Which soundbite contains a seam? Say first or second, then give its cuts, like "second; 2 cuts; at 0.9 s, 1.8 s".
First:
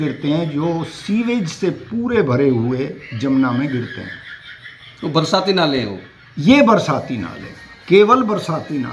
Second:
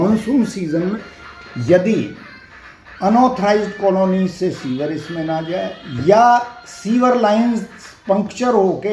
second; 1 cut; at 1.0 s